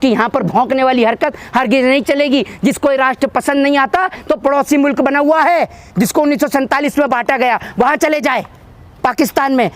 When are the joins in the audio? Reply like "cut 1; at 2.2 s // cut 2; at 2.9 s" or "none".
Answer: none